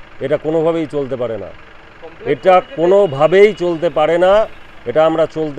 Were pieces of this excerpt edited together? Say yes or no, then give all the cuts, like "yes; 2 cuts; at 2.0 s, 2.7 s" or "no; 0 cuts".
no; 0 cuts